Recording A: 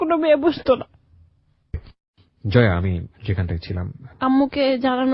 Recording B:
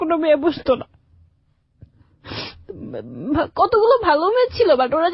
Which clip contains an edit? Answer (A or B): A